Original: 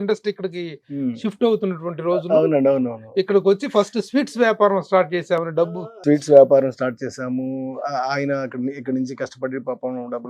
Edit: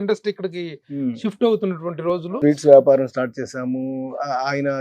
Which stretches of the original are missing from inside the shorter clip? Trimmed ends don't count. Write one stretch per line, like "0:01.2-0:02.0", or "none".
0:02.2-0:05.8